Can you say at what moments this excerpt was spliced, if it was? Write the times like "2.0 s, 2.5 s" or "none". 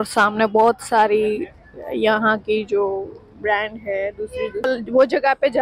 4.7 s